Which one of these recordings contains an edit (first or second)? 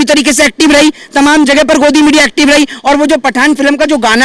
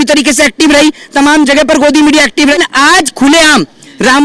second